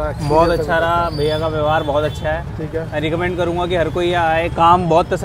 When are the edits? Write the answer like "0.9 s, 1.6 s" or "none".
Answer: none